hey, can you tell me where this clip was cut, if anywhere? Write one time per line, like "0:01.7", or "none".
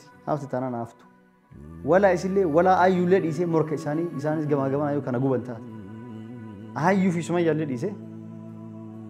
0:08.1